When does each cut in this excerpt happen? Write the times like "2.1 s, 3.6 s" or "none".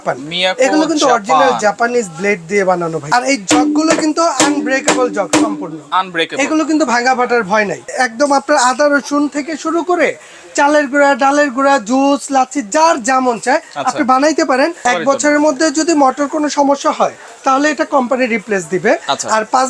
3.0 s, 7.8 s, 14.8 s

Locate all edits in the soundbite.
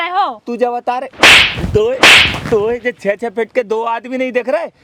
none

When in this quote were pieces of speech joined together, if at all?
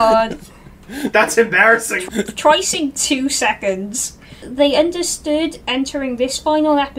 2.0 s, 4.4 s

